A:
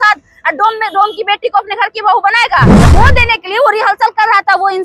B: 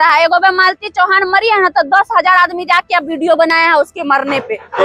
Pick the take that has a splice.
A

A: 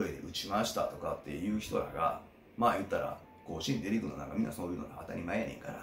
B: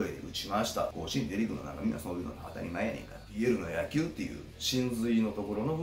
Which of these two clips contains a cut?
B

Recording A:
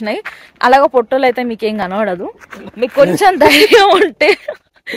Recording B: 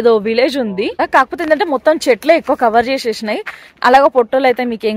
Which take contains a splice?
B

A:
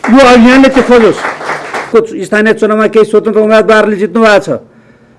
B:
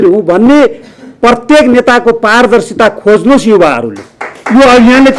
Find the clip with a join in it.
A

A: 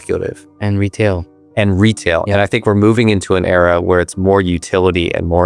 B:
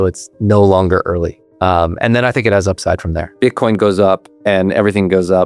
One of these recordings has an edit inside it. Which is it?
B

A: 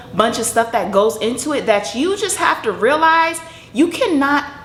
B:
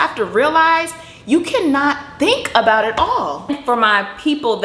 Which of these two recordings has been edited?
B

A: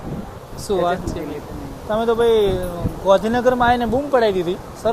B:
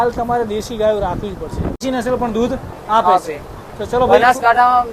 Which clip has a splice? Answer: B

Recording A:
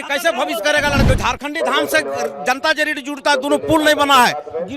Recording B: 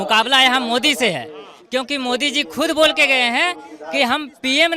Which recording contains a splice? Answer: A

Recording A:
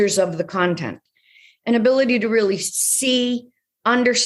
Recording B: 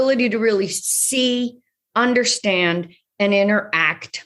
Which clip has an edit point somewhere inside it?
A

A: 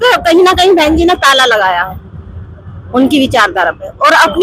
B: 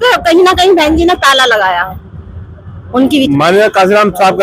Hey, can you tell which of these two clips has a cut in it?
B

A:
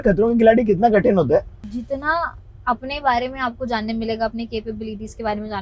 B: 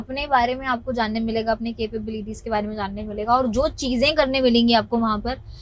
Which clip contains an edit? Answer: A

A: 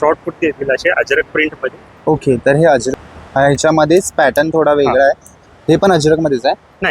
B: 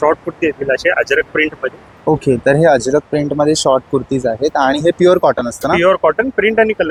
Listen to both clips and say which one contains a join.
A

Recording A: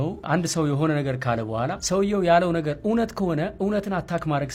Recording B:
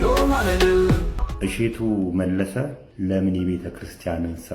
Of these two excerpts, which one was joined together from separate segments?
B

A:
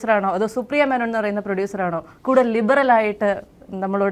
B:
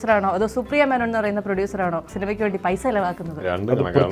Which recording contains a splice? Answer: B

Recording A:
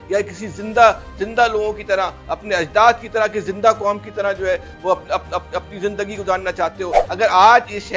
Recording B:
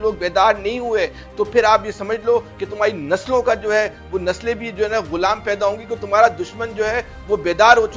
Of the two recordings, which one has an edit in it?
A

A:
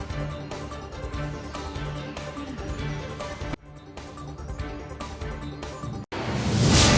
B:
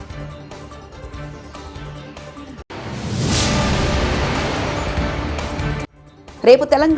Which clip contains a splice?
A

